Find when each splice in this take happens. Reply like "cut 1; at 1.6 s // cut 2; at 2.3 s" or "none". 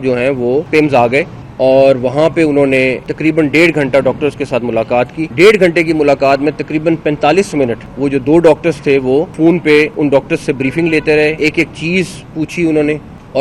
none